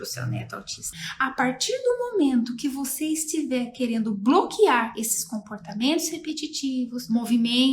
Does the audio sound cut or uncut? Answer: cut